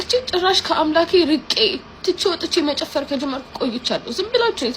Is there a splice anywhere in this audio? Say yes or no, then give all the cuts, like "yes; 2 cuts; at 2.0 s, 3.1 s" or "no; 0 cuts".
yes; 1 cut; at 1.9 s